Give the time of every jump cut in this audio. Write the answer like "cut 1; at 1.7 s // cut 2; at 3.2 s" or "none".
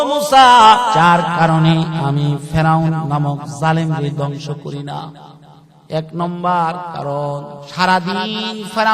cut 1; at 0.9 s // cut 2; at 7.6 s